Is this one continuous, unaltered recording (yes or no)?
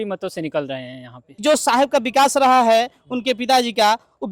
no